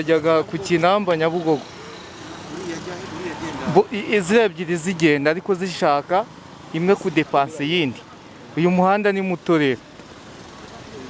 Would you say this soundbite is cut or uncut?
uncut